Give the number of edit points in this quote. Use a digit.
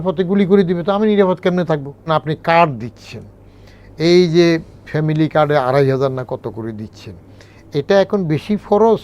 1